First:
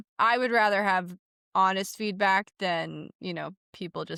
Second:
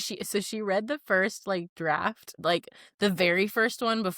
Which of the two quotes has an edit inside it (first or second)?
second